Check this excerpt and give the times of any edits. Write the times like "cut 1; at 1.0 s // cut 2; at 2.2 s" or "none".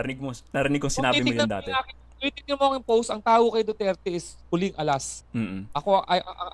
cut 1; at 5.2 s